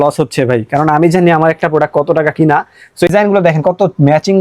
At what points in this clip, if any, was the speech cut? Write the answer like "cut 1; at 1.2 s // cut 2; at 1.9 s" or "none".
cut 1; at 3.1 s